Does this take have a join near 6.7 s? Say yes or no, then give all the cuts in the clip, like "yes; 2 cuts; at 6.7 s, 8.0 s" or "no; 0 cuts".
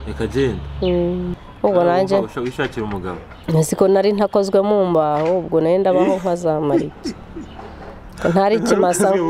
no; 1 cut; at 1.3 s